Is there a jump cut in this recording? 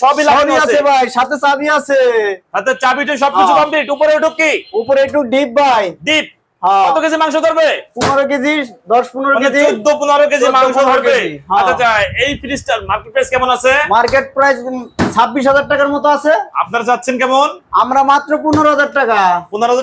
no; 0 cuts

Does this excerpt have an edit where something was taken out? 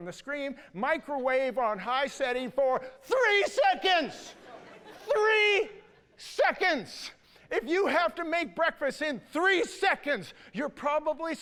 no; 0 cuts

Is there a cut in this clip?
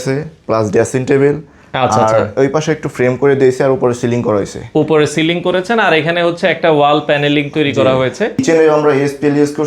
yes; 1 cut; at 8.4 s

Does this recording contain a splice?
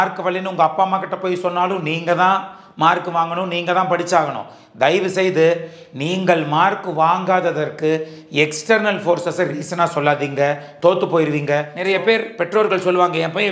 yes; 1 cut; at 11.7 s

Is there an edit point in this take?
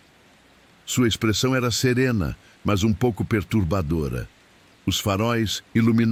no; 0 cuts

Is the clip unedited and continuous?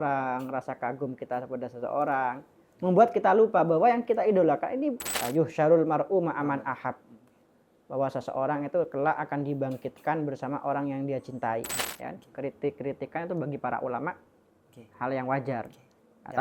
no; 2 cuts; at 5.1 s, 11.8 s

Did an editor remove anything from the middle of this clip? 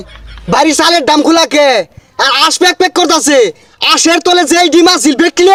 no; 0 cuts

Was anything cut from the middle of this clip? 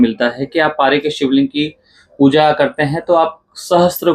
no; 0 cuts

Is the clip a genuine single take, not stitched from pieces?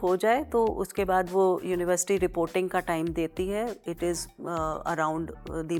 yes; 0 cuts

